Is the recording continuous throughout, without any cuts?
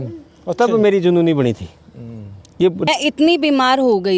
no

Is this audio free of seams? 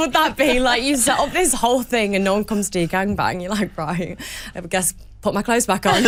yes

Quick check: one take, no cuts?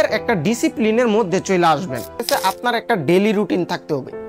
no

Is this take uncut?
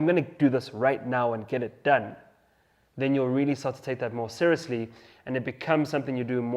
yes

